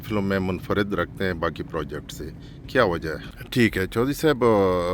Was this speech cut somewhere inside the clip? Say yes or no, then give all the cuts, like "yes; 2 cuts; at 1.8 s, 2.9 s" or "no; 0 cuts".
yes; 1 cut; at 3.3 s